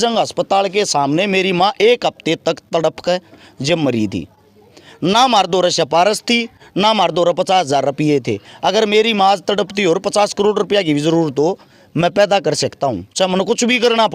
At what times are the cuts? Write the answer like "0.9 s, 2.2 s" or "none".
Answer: none